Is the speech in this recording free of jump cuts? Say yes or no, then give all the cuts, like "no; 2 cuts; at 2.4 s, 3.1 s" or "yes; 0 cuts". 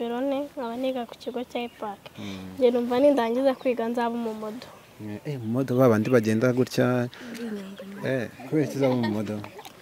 yes; 0 cuts